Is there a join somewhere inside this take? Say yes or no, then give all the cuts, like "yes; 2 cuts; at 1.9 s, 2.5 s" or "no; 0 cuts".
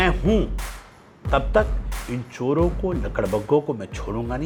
no; 0 cuts